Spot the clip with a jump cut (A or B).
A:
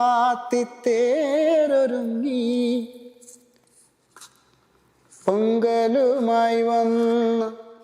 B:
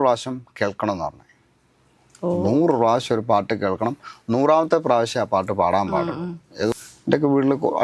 B